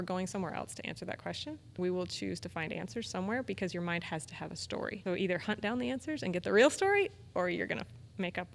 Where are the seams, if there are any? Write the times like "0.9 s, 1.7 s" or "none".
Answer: 1.7 s, 5.0 s